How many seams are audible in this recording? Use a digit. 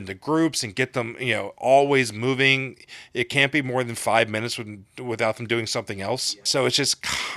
1